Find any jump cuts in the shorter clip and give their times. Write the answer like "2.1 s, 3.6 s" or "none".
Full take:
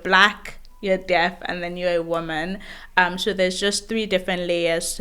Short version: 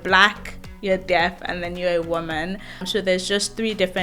2.8 s